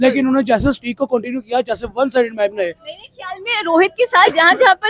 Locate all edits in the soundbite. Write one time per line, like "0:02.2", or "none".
none